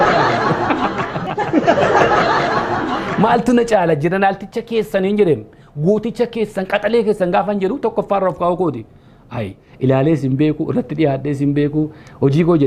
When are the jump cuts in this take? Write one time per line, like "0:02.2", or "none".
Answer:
0:09.6